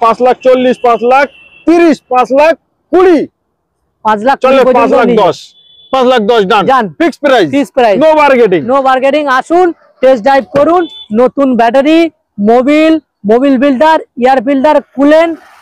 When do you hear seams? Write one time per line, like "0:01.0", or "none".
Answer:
none